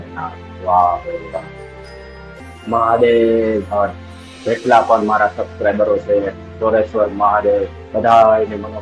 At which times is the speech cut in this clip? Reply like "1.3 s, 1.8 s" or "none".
2.4 s